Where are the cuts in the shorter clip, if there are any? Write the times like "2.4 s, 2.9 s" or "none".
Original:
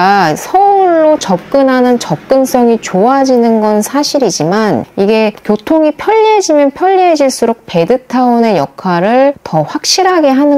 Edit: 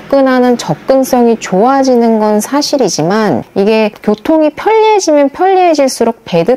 none